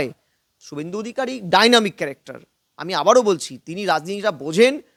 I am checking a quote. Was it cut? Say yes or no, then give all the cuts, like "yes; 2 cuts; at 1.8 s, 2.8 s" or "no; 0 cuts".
no; 0 cuts